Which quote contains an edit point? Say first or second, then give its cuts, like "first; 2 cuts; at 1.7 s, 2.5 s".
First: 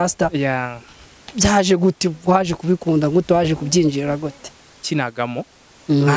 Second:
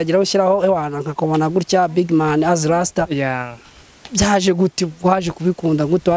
first; 1 cut; at 4.8 s